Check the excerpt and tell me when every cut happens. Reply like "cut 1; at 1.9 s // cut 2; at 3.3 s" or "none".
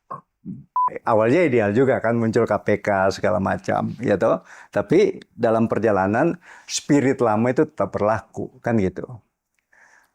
cut 1; at 0.9 s